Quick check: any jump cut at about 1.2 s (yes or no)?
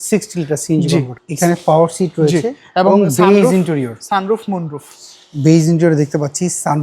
yes